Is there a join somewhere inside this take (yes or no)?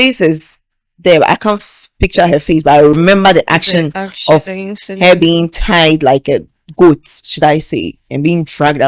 no